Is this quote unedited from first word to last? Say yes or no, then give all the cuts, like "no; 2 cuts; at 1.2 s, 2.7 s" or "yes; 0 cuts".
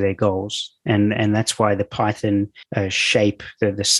no; 1 cut; at 2.6 s